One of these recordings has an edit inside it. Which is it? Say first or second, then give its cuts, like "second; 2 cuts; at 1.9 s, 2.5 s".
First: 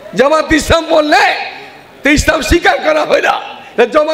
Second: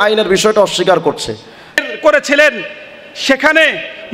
second; 1 cut; at 1.8 s